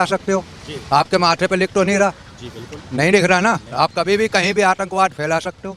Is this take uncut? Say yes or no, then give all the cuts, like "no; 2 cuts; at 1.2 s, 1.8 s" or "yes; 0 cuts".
yes; 0 cuts